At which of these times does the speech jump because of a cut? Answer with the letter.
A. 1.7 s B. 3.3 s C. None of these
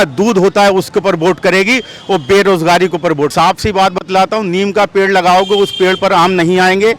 B